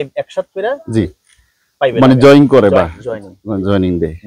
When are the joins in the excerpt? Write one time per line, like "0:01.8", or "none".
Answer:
none